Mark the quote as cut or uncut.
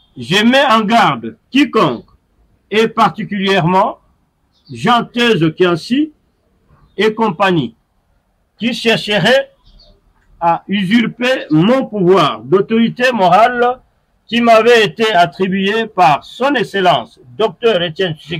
uncut